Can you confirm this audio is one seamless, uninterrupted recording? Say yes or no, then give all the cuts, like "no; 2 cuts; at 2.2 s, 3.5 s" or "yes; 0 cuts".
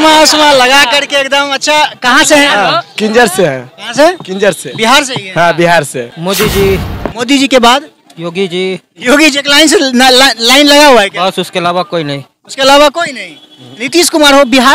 no; 1 cut; at 6.1 s